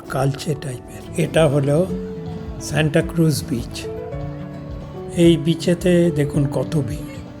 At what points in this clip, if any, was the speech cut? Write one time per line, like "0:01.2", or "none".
0:01.0